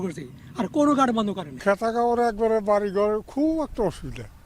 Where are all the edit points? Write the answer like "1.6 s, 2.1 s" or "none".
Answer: 1.5 s